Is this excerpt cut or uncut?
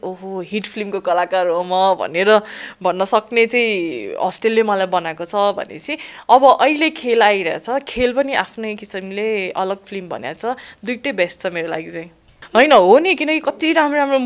cut